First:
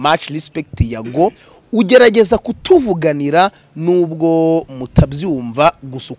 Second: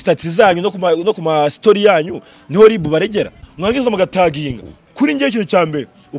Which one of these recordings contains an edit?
second; 1 cut; at 3.4 s

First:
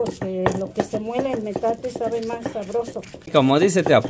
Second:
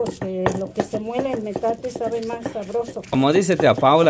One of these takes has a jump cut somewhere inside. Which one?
second; 1 cut; at 3.2 s

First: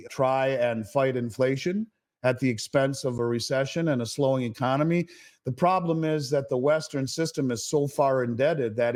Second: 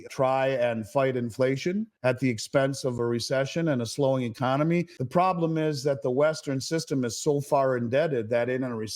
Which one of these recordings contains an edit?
second; 2 cuts; at 1.9 s, 5.0 s

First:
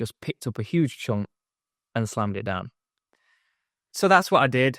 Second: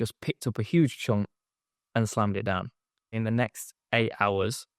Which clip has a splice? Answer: second; 1 cut; at 3.2 s

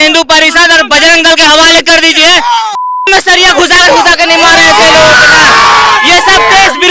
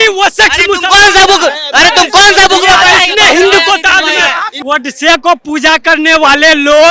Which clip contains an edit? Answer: second; 1 cut; at 4.5 s

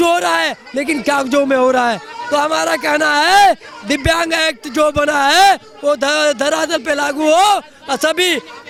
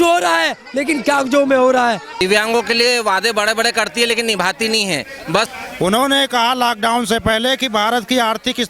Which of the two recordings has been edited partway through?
second; 2 cuts; at 2.1 s, 5.5 s

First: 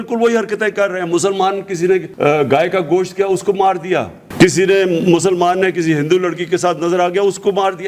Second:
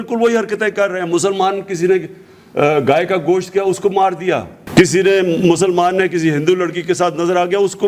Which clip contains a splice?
first; 1 cut; at 2.1 s

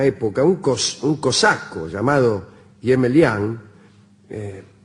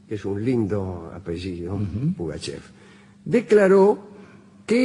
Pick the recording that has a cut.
first; 1 cut; at 2.9 s

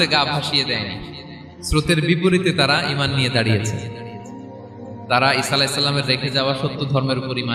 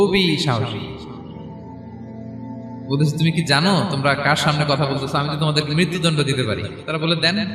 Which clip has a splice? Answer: second; 2 cuts; at 1.3 s, 2.9 s

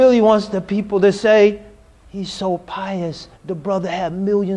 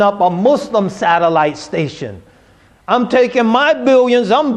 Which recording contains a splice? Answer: first; 1 cut; at 1.3 s

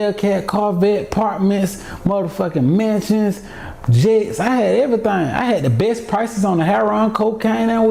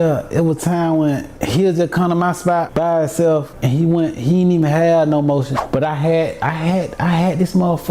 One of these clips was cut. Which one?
second; 4 cuts; at 1.3 s, 2.7 s, 3.5 s, 5.6 s

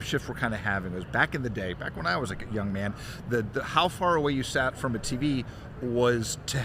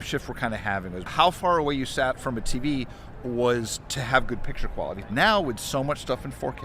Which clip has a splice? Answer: second; 2 cuts; at 1.1 s, 5.1 s

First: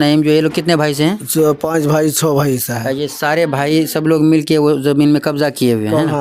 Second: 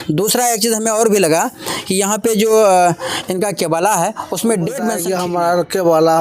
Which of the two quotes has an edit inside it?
second; 1 cut; at 5.0 s

